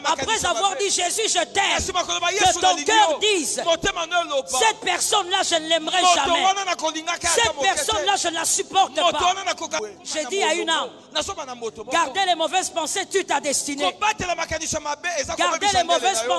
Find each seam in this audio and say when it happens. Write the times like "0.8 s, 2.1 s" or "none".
9.8 s